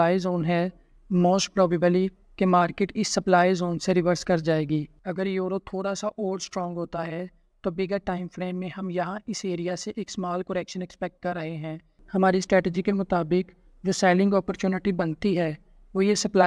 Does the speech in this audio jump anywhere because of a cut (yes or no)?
yes